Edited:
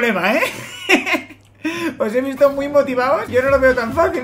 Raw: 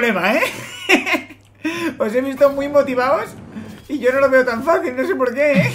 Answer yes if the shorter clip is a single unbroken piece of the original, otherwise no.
no